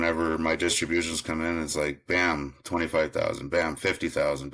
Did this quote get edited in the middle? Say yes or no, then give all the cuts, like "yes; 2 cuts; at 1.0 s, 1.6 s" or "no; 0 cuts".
no; 0 cuts